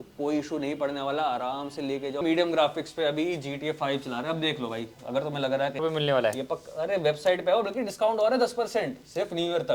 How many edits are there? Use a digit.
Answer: 2